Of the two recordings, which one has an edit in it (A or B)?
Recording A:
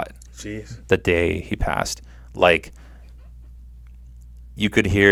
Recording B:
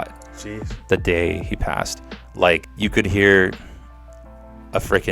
B